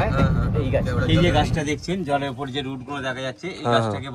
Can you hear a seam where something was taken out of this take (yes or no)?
yes